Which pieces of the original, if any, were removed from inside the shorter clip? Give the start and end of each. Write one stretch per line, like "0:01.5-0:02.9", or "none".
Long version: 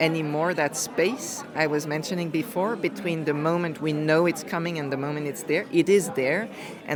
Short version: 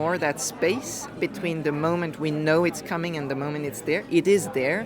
0:01.5-0:02.8